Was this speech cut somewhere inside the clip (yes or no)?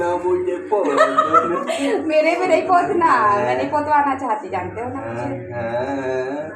no